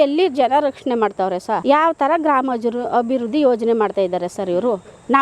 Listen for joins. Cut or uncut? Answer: cut